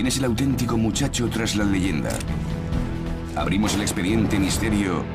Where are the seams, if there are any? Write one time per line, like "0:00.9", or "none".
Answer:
none